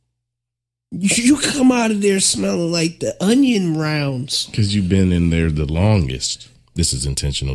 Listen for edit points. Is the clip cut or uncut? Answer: cut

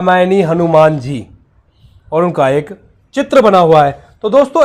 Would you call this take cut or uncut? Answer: uncut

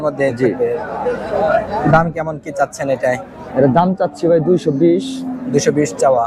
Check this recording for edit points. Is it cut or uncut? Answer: uncut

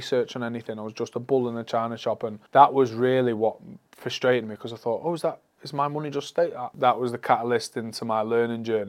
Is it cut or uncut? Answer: cut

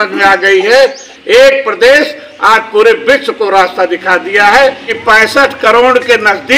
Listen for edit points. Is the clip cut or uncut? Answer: cut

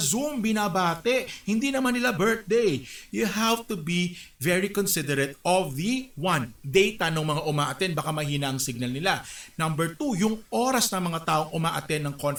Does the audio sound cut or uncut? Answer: uncut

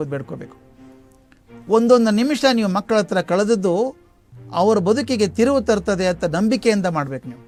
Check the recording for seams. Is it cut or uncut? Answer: uncut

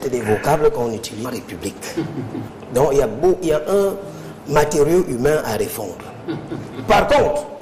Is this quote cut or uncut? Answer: uncut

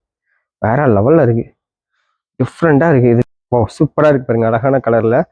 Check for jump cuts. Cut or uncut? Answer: cut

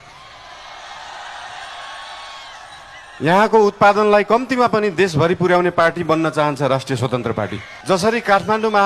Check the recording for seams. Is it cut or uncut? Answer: cut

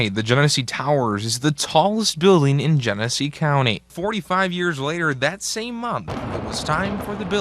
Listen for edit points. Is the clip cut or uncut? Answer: cut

